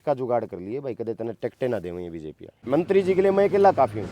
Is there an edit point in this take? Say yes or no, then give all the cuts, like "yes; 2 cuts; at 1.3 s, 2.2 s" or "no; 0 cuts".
yes; 1 cut; at 2.5 s